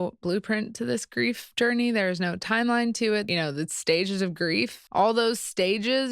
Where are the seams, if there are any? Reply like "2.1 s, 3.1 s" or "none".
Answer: 3.3 s, 4.8 s